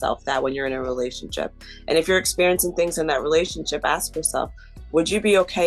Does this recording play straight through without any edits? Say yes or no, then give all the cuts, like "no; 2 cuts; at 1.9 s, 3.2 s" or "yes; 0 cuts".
yes; 0 cuts